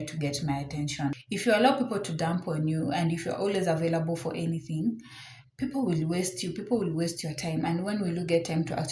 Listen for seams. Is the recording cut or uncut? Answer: cut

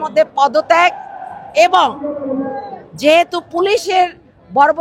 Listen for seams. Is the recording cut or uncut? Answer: uncut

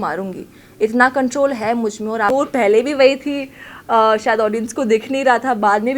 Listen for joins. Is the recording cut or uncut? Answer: cut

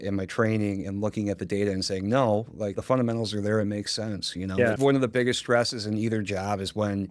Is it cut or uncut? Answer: cut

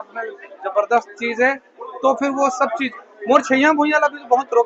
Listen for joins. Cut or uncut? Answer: uncut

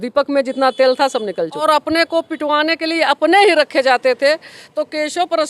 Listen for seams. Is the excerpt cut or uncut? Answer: cut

